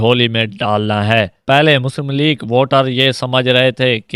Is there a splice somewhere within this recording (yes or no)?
no